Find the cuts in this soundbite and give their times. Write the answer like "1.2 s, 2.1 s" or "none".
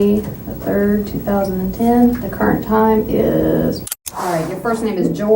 3.9 s